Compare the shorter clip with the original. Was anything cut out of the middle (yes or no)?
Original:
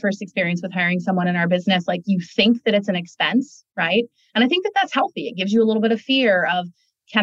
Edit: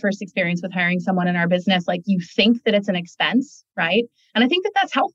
no